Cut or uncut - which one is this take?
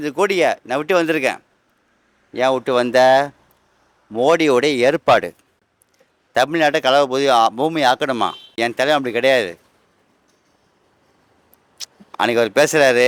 uncut